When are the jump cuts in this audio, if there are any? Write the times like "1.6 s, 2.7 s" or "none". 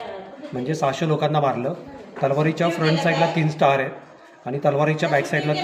none